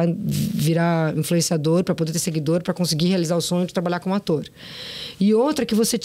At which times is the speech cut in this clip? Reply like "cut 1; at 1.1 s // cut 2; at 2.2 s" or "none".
none